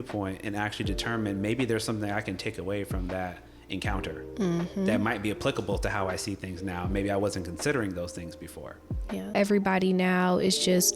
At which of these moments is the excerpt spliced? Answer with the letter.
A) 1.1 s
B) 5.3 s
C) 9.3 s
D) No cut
C